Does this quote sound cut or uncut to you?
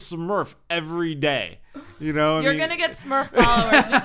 uncut